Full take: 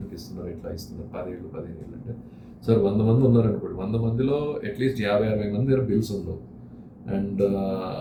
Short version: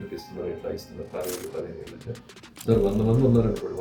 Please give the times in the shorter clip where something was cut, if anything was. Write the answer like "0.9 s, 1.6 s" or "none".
none